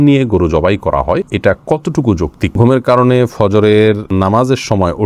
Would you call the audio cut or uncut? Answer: cut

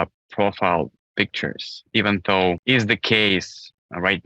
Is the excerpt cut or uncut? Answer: cut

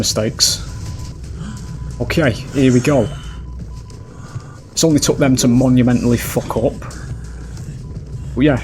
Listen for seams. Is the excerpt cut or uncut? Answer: cut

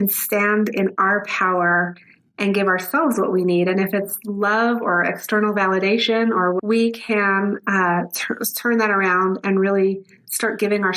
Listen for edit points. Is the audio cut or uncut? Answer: cut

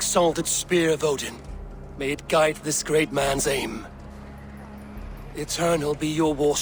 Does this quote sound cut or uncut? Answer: uncut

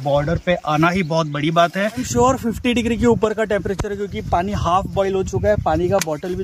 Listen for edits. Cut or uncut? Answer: cut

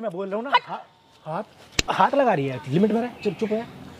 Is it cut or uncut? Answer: uncut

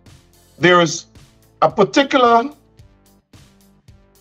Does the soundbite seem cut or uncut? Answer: uncut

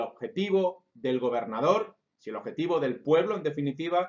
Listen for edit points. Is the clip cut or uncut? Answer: cut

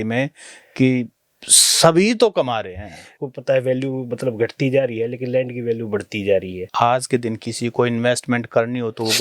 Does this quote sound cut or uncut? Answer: cut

